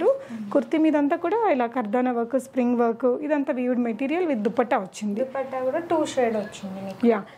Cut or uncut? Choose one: uncut